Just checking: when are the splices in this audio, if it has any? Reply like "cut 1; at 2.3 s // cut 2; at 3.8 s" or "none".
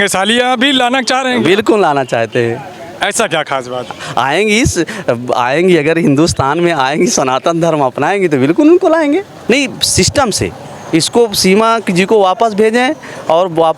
cut 1; at 9.3 s